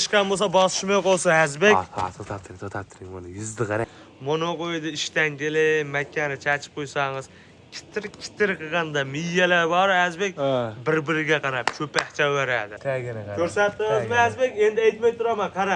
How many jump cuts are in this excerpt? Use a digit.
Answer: 2